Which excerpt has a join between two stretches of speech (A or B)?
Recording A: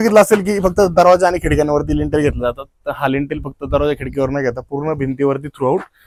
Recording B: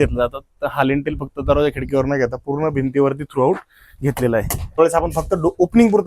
B